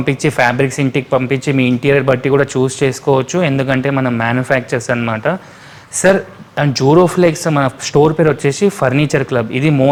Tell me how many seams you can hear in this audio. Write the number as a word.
zero